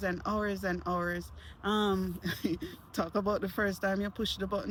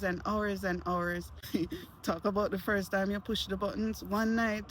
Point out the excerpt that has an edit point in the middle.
second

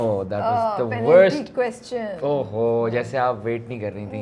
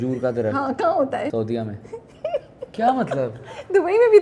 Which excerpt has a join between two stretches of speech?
second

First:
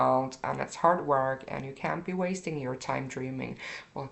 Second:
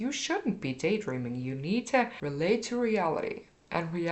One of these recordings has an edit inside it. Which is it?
second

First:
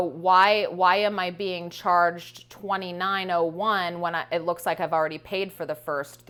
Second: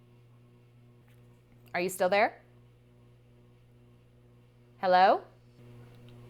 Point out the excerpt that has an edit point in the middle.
second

